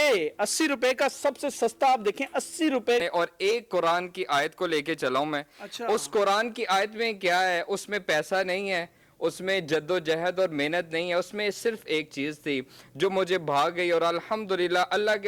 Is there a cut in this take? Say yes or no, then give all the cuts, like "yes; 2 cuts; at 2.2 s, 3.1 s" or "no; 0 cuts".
yes; 1 cut; at 3.0 s